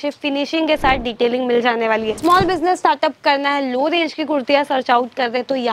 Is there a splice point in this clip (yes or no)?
yes